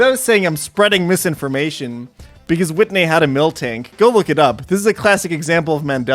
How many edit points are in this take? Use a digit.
0